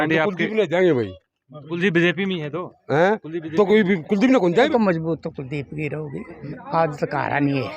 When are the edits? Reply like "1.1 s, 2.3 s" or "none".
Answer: 4.7 s, 6.3 s